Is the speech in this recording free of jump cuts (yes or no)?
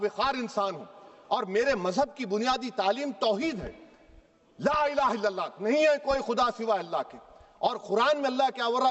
yes